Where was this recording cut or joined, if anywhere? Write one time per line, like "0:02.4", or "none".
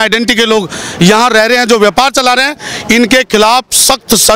none